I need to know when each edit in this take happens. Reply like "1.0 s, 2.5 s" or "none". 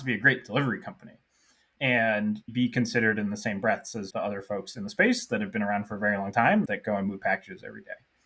2.4 s, 6.7 s